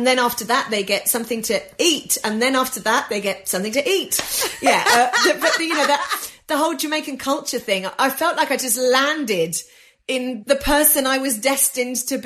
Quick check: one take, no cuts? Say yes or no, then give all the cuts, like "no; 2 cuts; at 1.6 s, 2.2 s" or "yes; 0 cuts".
no; 1 cut; at 10.1 s